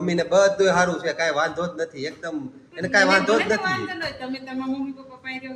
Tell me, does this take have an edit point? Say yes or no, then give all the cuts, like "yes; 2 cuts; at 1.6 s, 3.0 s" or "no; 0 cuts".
no; 0 cuts